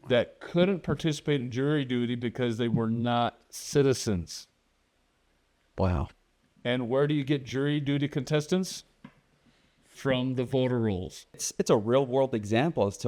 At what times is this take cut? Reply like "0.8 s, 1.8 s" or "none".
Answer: 11.5 s